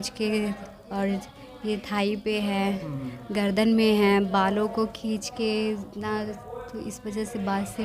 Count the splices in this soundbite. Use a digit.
0